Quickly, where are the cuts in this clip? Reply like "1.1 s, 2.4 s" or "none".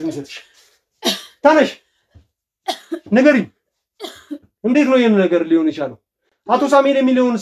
none